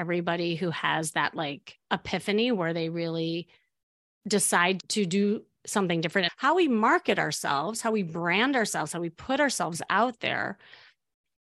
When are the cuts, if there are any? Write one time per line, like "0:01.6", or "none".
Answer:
0:06.3